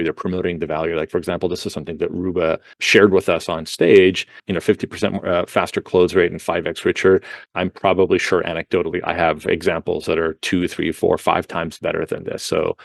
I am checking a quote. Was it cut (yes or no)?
yes